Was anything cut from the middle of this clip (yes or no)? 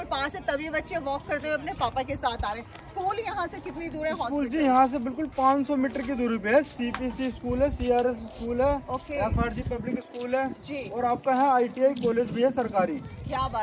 no